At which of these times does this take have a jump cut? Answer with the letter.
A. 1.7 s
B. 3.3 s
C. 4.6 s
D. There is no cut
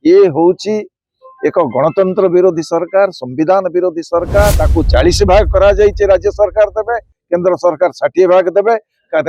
C